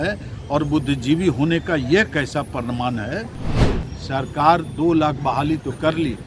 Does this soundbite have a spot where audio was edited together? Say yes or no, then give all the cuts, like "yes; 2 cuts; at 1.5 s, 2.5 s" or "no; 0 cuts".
yes; 1 cut; at 3.4 s